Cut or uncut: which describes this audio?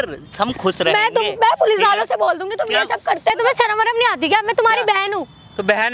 cut